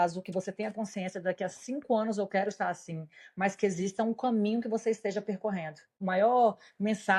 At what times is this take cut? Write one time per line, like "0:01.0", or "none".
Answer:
0:06.0

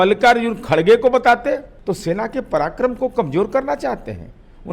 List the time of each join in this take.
0:01.7

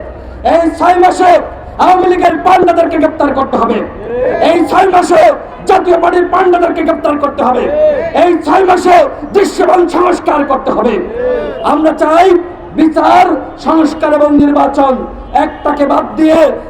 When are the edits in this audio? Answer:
none

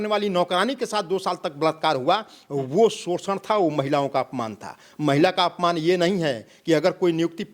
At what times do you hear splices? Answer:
none

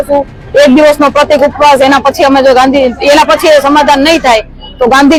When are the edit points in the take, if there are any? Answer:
none

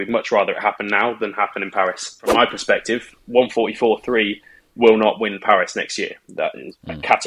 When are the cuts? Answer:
0:02.3

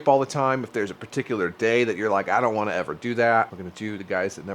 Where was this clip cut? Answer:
0:03.6

